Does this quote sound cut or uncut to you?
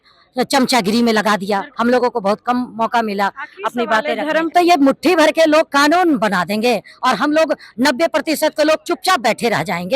cut